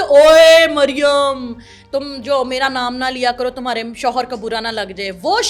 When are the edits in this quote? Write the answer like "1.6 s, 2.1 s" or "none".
none